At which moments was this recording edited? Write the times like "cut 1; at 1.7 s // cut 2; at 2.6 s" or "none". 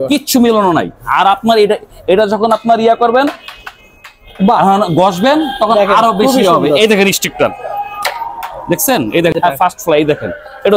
cut 1; at 9.3 s